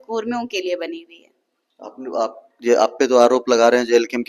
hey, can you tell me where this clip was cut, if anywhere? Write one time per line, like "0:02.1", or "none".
none